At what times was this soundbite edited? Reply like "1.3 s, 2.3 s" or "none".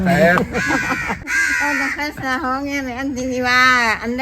1.3 s